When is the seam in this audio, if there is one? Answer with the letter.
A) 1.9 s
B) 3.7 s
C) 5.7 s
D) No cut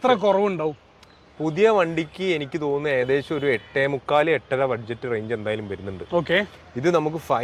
D